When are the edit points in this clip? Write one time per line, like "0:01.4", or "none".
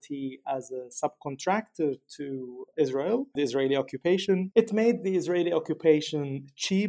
none